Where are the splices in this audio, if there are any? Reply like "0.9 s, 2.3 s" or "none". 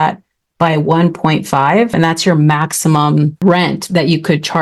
1.9 s, 3.4 s

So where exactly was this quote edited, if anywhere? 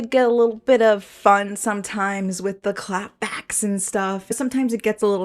4.3 s

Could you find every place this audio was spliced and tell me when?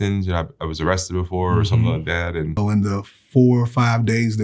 2.6 s

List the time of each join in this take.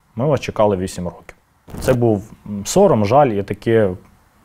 1.7 s

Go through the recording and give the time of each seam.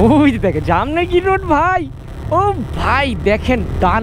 none

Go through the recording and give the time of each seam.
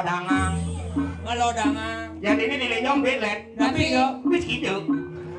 none

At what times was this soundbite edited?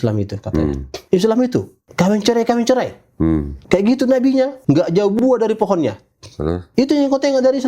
0.9 s, 1.8 s, 3.5 s, 4.6 s, 6.6 s

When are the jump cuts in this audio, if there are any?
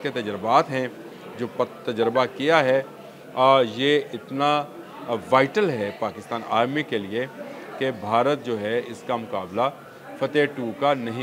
none

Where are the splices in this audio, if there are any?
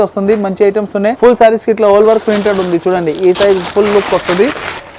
none

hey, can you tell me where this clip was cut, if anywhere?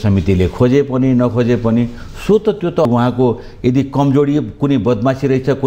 2.9 s

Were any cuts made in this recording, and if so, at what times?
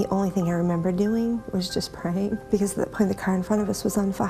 2.4 s

